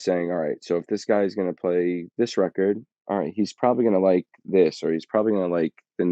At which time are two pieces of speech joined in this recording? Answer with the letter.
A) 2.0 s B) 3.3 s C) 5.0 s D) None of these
D